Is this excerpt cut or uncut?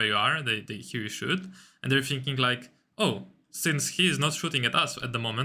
uncut